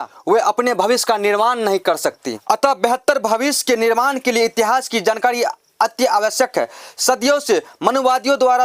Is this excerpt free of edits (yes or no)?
yes